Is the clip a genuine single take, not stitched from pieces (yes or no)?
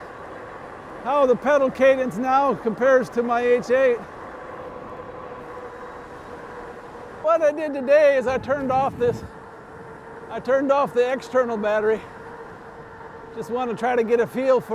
no